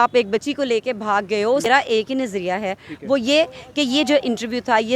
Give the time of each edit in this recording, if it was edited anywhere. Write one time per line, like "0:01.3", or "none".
0:01.7